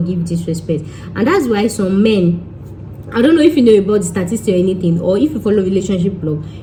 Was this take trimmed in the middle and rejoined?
no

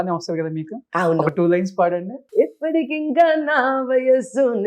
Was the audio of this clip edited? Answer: yes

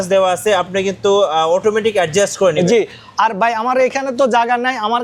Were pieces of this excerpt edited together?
no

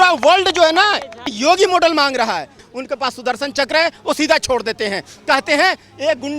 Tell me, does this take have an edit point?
yes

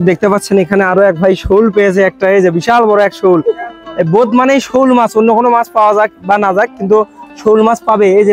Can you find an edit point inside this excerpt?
no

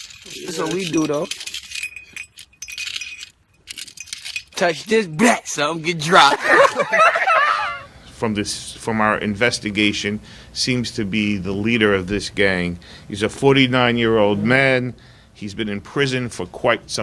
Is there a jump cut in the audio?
yes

